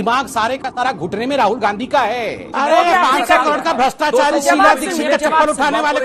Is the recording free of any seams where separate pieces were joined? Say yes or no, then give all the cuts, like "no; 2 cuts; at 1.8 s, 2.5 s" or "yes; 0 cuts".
no; 1 cut; at 2.4 s